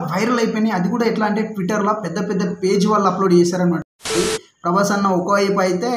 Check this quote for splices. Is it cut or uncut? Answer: cut